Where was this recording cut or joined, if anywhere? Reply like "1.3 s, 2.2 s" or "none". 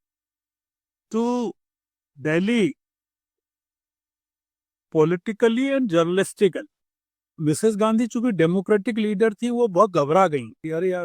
7.3 s